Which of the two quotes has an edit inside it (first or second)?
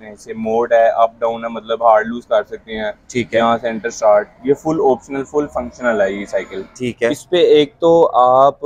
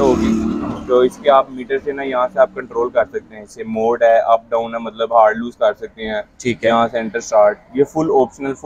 first